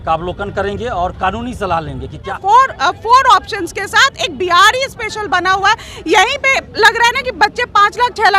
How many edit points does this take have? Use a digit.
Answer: 1